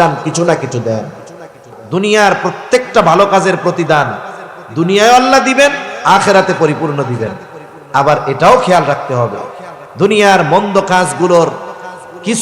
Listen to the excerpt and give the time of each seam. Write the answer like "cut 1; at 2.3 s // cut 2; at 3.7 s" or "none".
cut 1; at 1.8 s